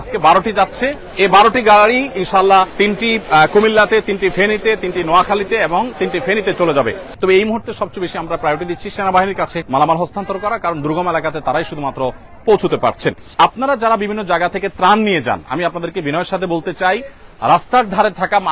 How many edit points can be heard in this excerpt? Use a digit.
5